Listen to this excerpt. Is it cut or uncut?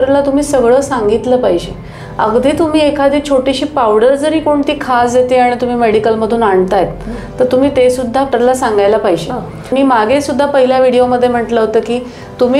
cut